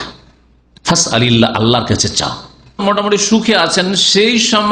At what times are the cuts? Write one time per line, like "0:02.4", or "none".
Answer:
0:02.8